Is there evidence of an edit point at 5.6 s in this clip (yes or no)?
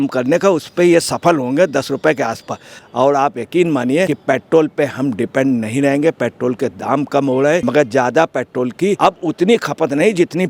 no